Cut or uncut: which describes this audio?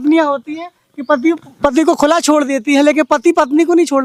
uncut